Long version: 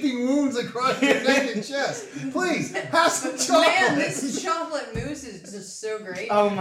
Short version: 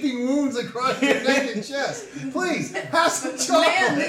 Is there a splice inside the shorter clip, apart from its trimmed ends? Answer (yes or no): no